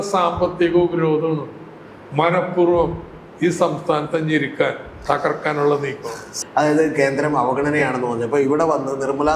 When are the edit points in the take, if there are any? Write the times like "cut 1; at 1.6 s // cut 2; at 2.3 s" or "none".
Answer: cut 1; at 6.2 s